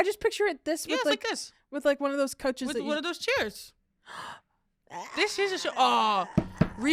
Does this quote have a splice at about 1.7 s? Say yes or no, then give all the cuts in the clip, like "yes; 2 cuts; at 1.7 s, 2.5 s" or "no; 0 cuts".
no; 0 cuts